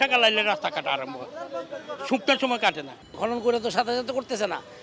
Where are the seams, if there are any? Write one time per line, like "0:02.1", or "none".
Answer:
0:03.0